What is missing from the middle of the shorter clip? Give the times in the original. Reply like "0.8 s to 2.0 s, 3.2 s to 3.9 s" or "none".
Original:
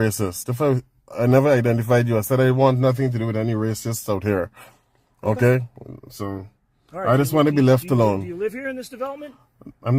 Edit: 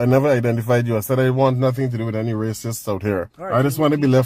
4.6 s to 6.9 s